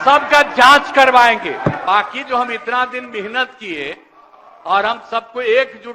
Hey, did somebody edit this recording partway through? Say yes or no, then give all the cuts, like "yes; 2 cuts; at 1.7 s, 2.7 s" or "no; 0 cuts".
yes; 1 cut; at 1.8 s